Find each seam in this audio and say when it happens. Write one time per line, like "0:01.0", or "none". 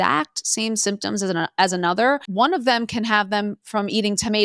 0:02.3